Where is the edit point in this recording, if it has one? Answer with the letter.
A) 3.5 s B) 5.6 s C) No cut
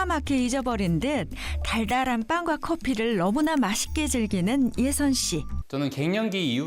B